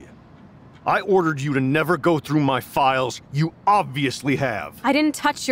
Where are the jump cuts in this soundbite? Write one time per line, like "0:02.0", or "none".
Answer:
none